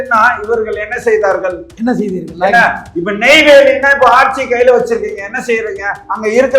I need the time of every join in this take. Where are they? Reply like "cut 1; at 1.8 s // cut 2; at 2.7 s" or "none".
cut 1; at 1.7 s